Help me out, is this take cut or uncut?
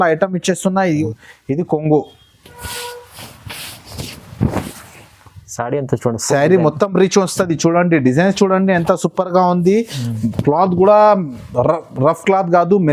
cut